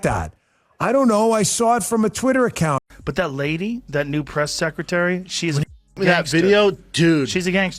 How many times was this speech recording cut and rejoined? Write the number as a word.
one